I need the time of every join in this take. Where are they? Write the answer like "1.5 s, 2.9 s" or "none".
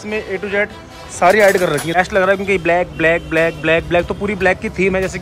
2.0 s